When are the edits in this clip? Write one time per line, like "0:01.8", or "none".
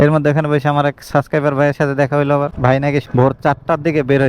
0:02.5